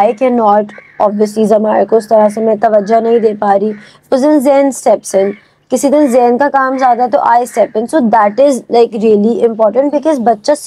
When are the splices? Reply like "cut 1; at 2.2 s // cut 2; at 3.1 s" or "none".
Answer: none